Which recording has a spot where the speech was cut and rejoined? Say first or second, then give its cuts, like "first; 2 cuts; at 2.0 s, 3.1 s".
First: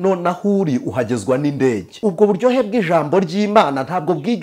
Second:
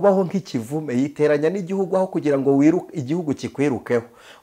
first; 1 cut; at 1.9 s